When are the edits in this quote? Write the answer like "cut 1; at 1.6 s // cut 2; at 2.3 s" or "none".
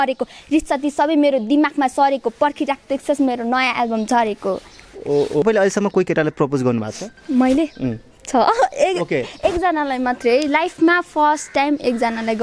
cut 1; at 5.4 s